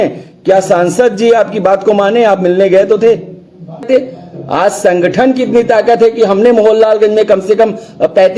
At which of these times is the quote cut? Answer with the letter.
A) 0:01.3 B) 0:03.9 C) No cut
B